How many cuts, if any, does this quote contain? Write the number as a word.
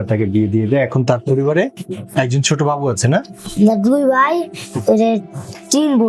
one